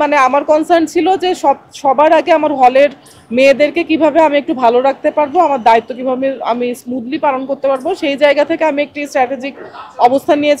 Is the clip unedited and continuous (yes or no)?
yes